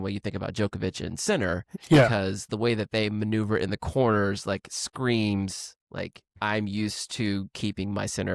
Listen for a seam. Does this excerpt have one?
yes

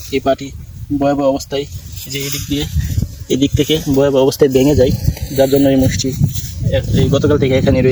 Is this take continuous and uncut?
yes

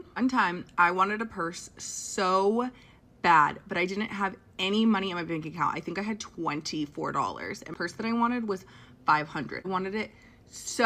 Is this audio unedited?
yes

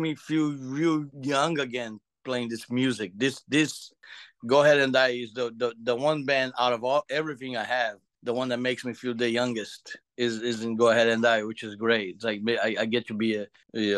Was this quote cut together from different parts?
yes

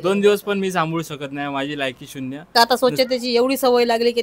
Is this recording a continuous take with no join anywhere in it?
no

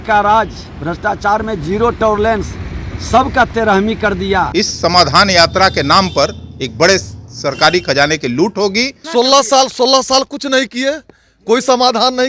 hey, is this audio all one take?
no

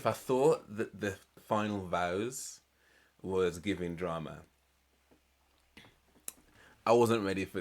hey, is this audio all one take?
no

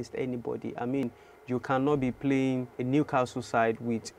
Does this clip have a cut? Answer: yes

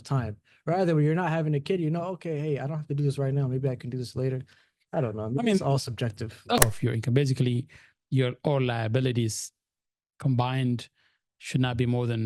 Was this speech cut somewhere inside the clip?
yes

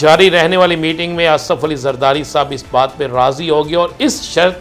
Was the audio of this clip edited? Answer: no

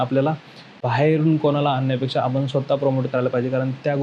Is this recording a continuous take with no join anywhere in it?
yes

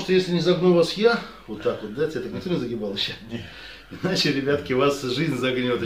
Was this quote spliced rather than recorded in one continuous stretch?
no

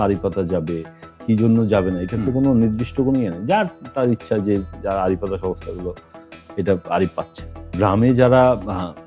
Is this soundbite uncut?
yes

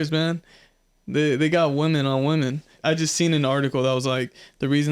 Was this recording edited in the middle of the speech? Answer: yes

